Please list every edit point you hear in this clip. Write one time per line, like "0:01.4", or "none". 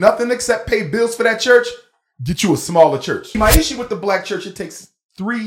0:03.4